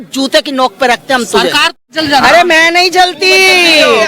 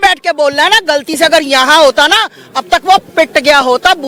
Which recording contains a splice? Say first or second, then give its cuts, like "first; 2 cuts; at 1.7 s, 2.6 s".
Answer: first; 1 cut; at 1.7 s